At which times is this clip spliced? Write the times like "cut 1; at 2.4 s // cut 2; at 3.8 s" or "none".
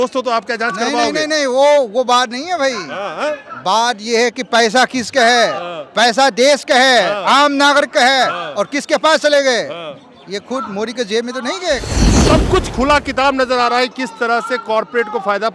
cut 1; at 12.3 s

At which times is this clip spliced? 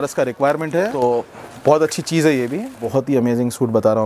cut 1; at 1.0 s // cut 2; at 2.9 s

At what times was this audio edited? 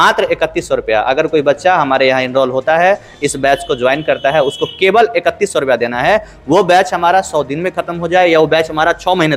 none

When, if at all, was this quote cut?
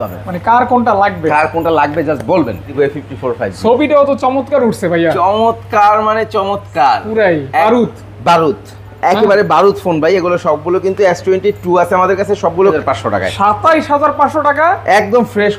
cut 1; at 2.7 s // cut 2; at 7.6 s // cut 3; at 12.8 s

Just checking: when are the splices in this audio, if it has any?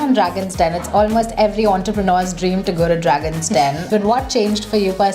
cut 1; at 3.9 s

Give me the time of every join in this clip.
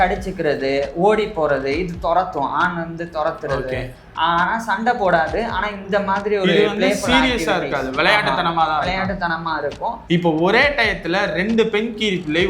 cut 1; at 10.0 s

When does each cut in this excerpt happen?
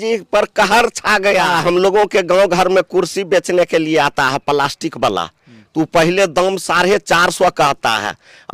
cut 1; at 1.5 s

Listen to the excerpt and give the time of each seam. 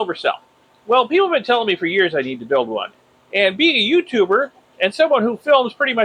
cut 1; at 2.9 s

